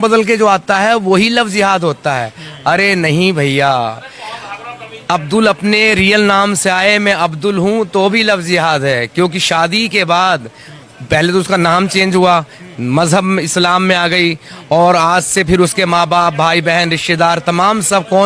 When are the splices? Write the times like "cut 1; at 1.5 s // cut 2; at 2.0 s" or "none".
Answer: none